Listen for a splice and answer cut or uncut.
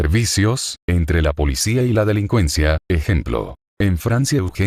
uncut